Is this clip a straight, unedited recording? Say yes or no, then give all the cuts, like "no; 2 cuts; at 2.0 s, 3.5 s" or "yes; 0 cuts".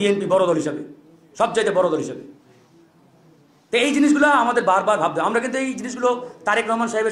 yes; 0 cuts